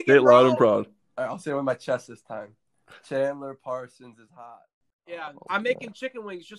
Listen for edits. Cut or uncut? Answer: cut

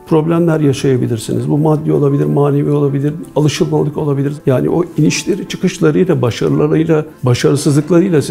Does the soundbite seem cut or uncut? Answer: cut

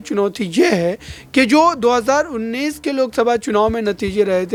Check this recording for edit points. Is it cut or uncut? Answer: uncut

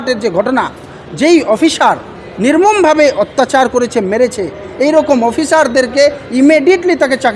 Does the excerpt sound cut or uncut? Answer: uncut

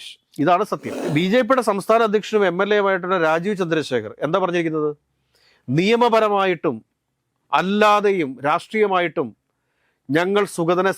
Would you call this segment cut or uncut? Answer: cut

